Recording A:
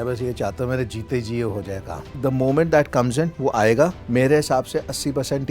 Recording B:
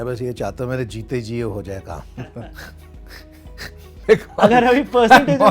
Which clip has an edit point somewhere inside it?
A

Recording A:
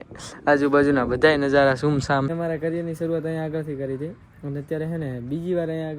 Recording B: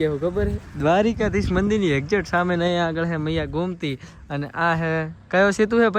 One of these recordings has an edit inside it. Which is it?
A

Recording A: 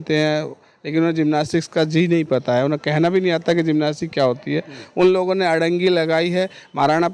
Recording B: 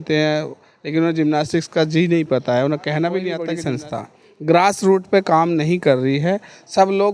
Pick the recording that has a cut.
B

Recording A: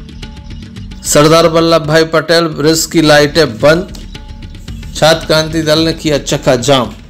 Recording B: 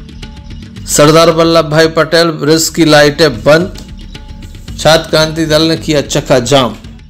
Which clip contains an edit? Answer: B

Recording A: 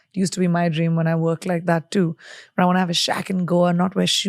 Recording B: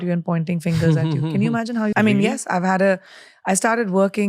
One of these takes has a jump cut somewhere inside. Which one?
B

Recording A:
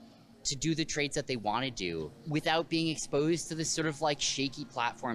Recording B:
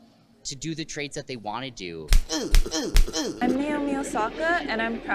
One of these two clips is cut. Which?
A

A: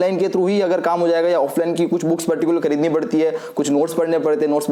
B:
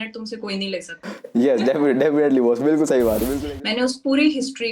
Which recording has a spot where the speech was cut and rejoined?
B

